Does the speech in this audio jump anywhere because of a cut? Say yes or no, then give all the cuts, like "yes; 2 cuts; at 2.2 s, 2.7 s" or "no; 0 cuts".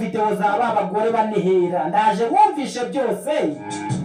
no; 0 cuts